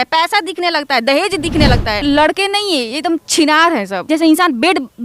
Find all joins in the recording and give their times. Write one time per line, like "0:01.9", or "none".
0:02.0
0:04.0